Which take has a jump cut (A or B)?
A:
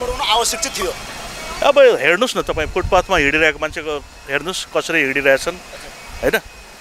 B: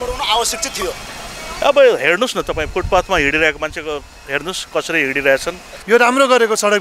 B